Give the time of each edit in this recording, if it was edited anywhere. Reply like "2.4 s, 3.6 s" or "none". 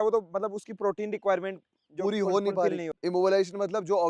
none